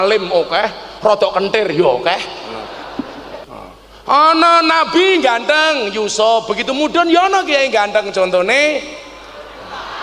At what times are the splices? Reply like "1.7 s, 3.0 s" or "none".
3.4 s